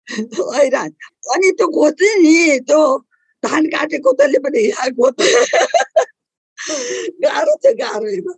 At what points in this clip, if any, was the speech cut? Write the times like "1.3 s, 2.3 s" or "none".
1.0 s